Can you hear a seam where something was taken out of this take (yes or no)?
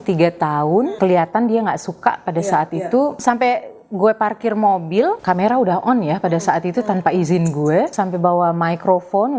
yes